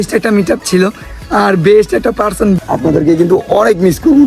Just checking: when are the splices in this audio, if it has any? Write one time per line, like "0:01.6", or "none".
0:02.6